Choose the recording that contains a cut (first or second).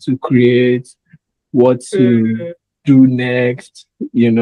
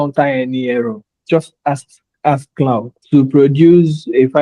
second